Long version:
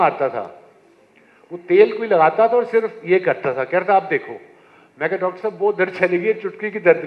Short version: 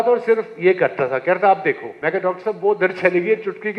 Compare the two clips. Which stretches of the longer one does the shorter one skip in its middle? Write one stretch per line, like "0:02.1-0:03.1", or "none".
0:04.3-0:04.9